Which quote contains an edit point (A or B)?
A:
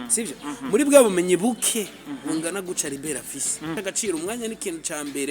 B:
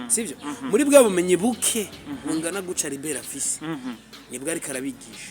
A